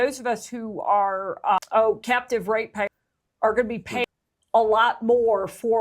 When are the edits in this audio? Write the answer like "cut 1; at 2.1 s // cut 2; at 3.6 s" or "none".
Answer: cut 1; at 1.6 s // cut 2; at 2.9 s // cut 3; at 4.1 s